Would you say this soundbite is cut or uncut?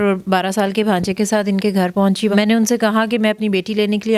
cut